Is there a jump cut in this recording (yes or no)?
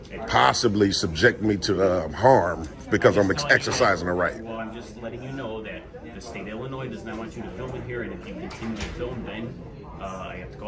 no